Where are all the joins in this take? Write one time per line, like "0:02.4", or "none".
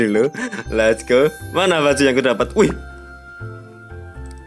none